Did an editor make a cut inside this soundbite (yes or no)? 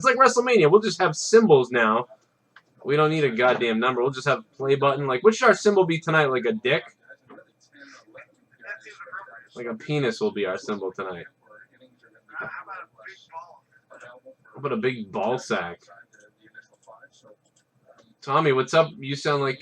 yes